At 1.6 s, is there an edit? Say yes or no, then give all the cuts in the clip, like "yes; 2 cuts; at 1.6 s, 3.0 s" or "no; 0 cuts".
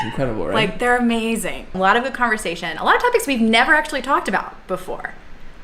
yes; 1 cut; at 1.6 s